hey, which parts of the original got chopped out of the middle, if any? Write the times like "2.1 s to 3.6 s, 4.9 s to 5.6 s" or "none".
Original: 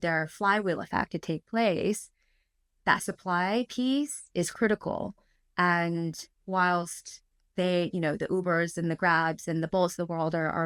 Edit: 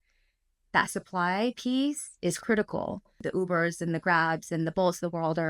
5.4 s to 8.2 s